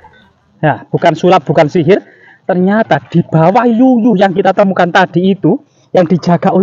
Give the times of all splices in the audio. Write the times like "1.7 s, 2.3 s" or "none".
none